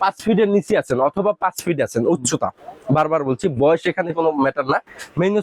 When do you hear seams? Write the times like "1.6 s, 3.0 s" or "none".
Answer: none